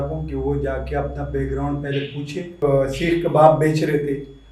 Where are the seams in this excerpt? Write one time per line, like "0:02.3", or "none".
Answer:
0:02.6